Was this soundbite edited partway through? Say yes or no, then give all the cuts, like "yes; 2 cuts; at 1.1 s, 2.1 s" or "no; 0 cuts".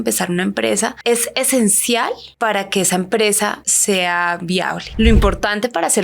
yes; 4 cuts; at 1.0 s, 2.2 s, 3.7 s, 4.8 s